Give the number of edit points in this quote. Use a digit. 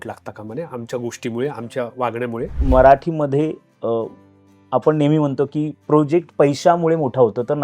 1